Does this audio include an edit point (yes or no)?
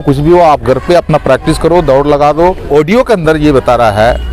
yes